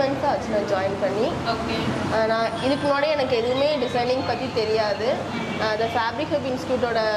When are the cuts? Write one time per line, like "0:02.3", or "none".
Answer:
none